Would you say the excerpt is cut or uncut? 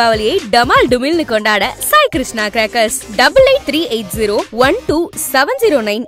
uncut